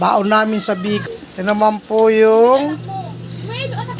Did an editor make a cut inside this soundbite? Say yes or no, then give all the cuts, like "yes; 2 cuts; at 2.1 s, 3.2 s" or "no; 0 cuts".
yes; 1 cut; at 1.0 s